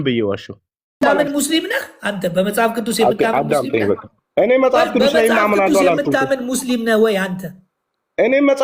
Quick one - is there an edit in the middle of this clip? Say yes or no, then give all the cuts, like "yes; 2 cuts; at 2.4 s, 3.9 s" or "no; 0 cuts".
yes; 1 cut; at 1.0 s